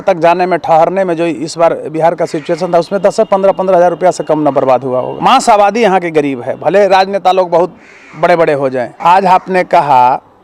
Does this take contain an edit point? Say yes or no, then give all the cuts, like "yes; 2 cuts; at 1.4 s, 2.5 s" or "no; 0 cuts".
yes; 2 cuts; at 5.1 s, 8.9 s